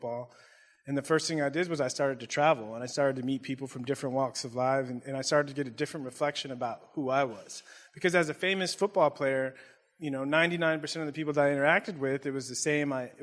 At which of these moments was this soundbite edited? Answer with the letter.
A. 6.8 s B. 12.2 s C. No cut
C